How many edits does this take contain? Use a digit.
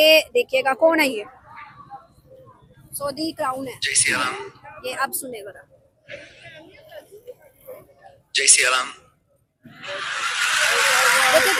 0